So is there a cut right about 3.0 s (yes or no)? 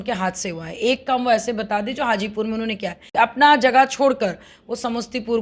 yes